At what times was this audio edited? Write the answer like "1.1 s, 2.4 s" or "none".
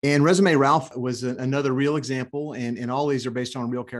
none